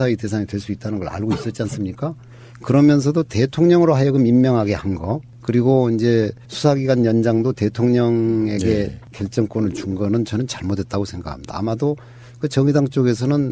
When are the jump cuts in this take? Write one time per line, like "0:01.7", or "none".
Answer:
none